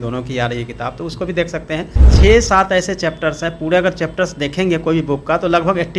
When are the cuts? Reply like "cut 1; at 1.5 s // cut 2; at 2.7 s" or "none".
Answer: cut 1; at 2.0 s